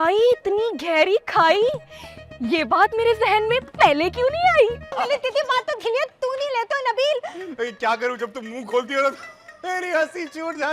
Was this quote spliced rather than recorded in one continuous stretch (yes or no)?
yes